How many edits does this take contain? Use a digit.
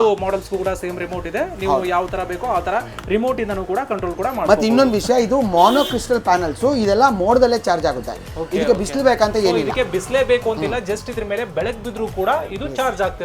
0